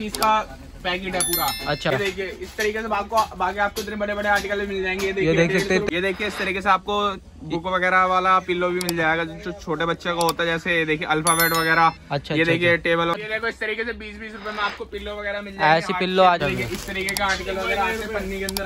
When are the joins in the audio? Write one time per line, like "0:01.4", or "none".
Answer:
0:01.9
0:05.9
0:13.1
0:16.4